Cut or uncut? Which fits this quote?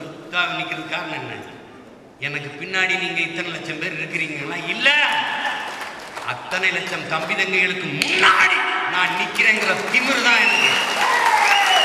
uncut